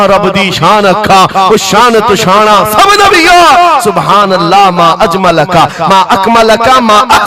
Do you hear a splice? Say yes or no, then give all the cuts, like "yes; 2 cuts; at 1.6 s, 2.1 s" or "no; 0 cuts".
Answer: no; 0 cuts